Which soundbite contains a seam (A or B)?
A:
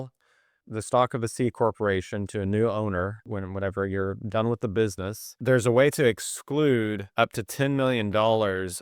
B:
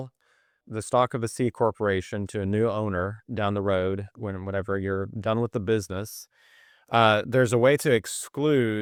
A